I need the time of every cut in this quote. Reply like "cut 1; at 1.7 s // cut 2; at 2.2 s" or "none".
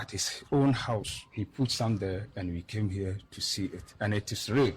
cut 1; at 1.2 s // cut 2; at 3.8 s